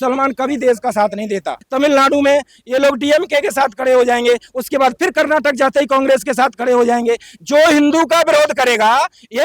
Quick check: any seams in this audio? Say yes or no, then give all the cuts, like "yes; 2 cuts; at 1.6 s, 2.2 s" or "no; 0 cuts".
yes; 1 cut; at 1.6 s